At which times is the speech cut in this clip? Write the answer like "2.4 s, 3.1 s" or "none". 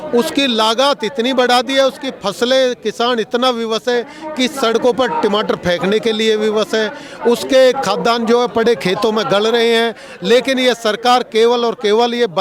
none